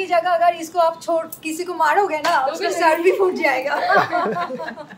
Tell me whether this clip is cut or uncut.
uncut